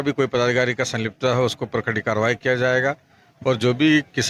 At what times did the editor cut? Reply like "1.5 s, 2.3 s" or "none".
none